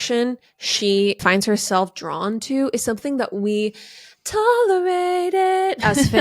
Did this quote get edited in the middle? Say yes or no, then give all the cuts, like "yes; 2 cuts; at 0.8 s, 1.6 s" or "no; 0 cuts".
yes; 1 cut; at 1.2 s